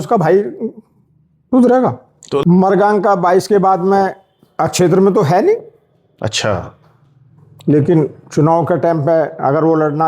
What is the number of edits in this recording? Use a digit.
1